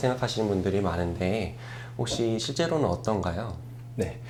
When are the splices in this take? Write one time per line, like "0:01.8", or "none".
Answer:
none